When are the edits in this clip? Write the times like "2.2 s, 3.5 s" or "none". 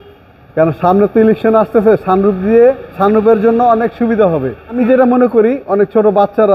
4.8 s

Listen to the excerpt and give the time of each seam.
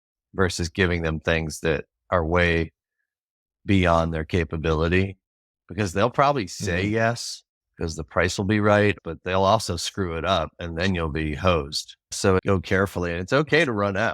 9.0 s, 12.3 s

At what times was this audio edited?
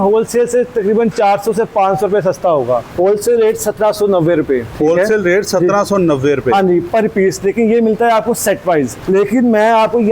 2.9 s, 4.7 s, 9.0 s

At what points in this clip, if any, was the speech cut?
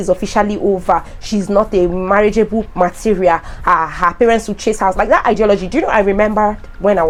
none

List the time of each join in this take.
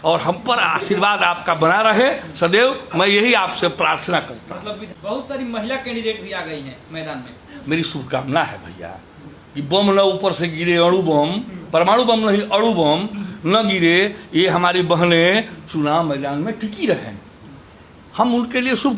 4.9 s

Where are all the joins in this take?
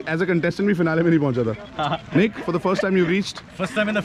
none

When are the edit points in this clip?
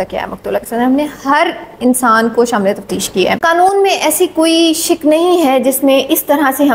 3.4 s

